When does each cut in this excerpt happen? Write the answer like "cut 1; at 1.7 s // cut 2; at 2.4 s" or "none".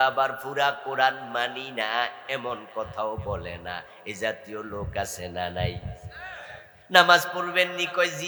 none